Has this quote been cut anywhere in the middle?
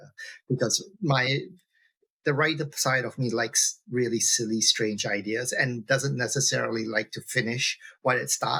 no; 0 cuts

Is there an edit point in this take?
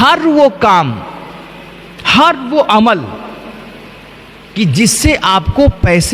no; 0 cuts

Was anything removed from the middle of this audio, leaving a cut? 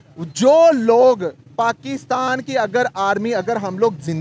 no; 0 cuts

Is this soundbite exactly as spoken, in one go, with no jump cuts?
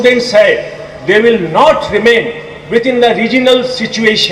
yes; 0 cuts

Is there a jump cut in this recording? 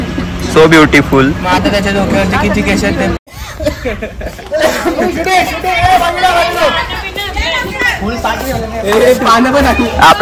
yes; 1 cut; at 3.3 s

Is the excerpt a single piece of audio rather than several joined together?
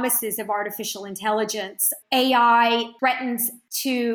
no; 2 cuts; at 2.0 s, 3.2 s

